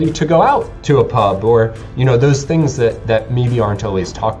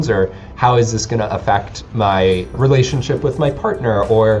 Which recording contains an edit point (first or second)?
second